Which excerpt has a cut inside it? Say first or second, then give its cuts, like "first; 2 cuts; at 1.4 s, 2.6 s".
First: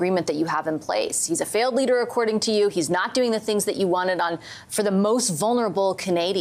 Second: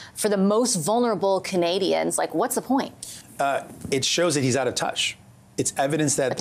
second; 1 cut; at 3.2 s